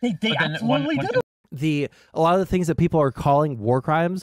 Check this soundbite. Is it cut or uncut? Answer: cut